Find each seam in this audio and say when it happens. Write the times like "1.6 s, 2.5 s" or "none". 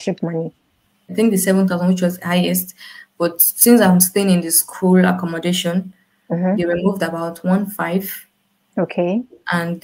1.0 s